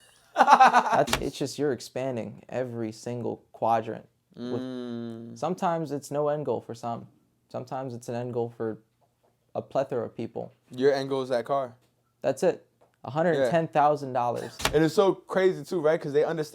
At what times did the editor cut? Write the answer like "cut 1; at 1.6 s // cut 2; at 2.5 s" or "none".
cut 1; at 1.1 s // cut 2; at 14.5 s